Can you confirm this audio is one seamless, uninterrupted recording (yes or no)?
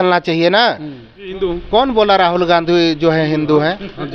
no